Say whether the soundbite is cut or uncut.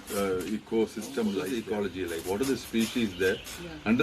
cut